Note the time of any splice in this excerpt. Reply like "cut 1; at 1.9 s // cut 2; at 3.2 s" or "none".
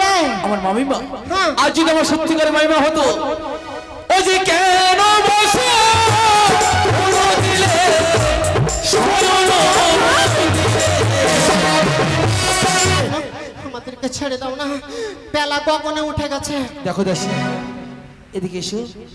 cut 1; at 13.0 s